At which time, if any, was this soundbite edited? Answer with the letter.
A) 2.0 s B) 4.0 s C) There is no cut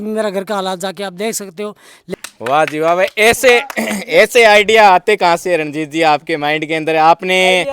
A